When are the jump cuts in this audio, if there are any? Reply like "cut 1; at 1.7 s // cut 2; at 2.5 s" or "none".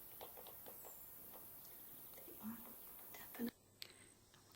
cut 1; at 3.5 s